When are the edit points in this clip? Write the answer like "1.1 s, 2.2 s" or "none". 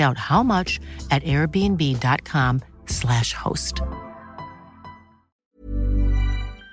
5.3 s